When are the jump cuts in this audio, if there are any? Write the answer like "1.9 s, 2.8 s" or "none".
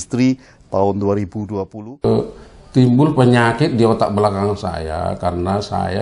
2.0 s